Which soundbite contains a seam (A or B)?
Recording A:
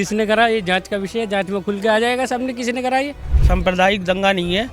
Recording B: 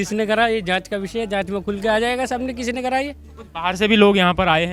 A